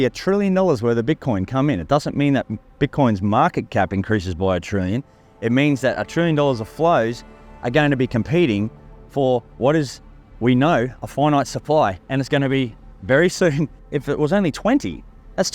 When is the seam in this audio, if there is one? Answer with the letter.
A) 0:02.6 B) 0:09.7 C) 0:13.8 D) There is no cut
C